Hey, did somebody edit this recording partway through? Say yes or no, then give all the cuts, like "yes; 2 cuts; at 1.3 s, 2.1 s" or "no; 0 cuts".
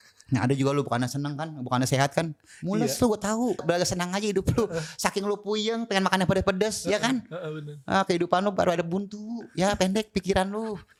no; 0 cuts